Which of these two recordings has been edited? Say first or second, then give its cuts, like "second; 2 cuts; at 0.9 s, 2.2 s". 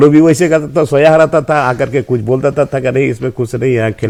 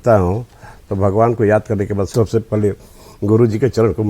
second; 1 cut; at 2.1 s